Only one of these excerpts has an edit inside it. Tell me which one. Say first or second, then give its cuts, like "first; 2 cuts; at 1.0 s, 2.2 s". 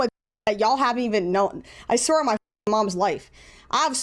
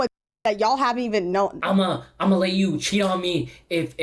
second; 1 cut; at 1.6 s